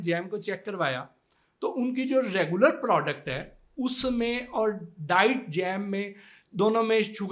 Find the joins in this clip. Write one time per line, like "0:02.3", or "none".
none